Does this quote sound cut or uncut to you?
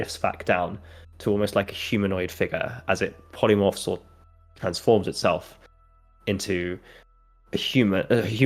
uncut